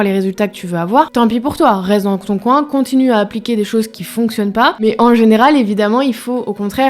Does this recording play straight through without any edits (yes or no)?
no